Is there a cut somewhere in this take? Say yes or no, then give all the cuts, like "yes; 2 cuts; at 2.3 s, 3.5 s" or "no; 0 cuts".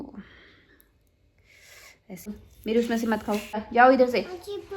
yes; 2 cuts; at 2.3 s, 3.7 s